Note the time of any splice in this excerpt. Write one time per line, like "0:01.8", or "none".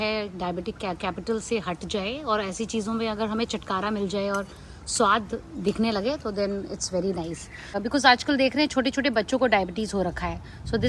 0:07.8